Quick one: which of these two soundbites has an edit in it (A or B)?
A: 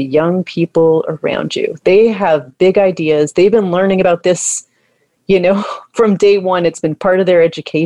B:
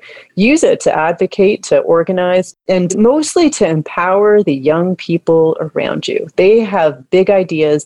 B